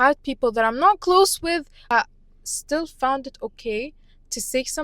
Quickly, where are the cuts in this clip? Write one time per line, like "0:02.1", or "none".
0:01.8